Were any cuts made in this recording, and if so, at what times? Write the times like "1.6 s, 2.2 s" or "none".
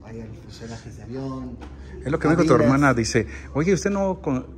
none

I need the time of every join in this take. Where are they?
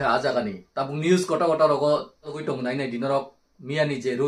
2.4 s

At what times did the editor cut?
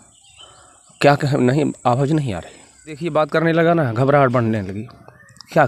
3.0 s

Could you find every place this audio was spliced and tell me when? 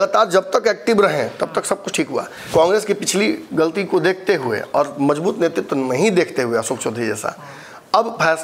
2.4 s

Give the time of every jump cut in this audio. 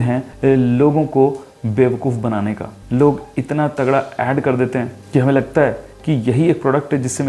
2.8 s

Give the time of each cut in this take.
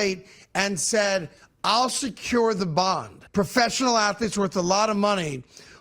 3.2 s

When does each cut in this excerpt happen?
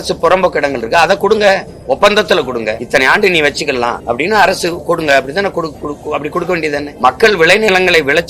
2.8 s, 4.0 s, 6.9 s

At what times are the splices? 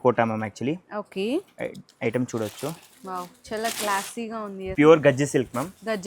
4.6 s

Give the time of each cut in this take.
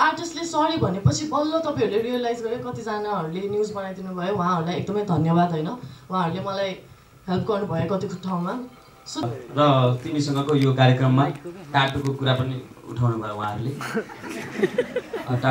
9.2 s

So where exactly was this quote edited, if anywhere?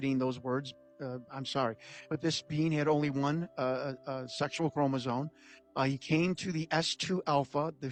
none

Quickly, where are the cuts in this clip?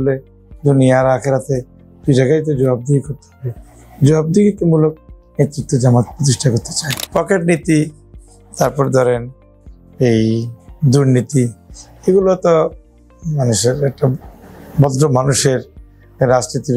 7.0 s

